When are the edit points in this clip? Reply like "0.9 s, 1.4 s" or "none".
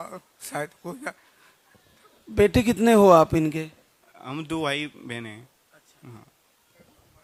none